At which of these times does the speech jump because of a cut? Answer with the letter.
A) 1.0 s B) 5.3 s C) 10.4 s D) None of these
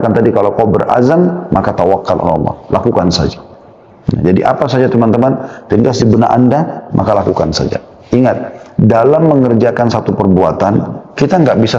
D